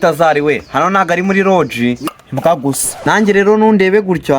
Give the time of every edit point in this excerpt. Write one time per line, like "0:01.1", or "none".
0:02.0